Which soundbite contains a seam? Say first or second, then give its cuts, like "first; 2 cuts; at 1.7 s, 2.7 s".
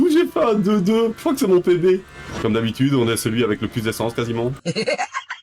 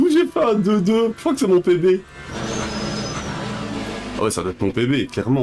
first; 1 cut; at 2.3 s